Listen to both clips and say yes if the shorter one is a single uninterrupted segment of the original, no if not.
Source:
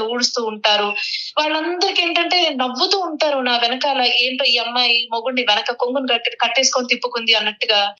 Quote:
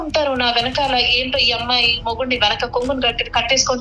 yes